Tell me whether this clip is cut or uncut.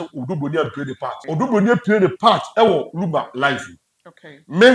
cut